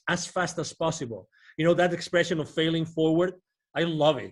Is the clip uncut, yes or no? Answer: yes